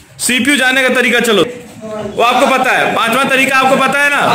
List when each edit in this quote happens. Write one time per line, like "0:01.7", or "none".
0:01.5